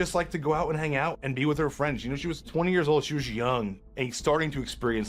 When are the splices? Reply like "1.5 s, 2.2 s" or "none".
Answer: 1.2 s, 2.5 s, 3.8 s